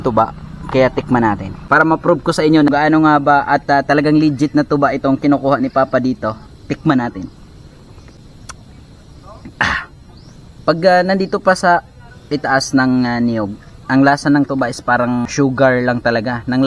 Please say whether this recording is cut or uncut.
cut